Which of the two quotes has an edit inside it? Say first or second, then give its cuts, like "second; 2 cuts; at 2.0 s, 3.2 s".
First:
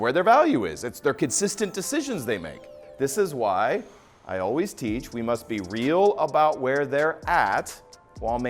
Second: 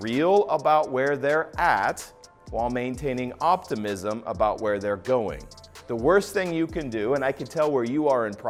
first; 1 cut; at 2.8 s